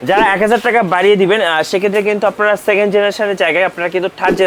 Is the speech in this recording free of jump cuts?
yes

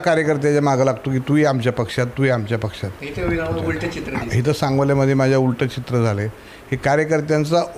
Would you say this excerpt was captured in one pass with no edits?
yes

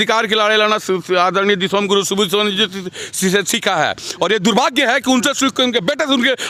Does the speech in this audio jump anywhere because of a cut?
no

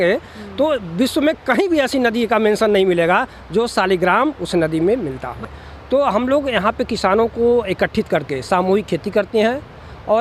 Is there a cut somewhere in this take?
yes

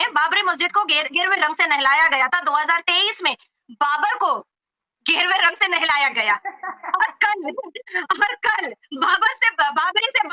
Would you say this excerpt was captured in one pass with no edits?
yes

